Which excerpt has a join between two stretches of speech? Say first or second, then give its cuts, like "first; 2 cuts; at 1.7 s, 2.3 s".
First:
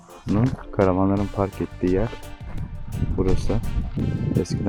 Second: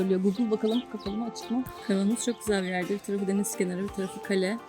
second; 1 cut; at 1.8 s